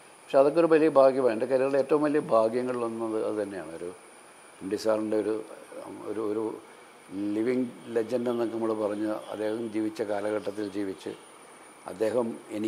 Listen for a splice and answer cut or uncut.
uncut